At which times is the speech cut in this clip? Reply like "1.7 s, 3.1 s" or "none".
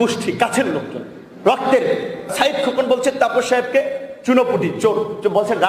2.3 s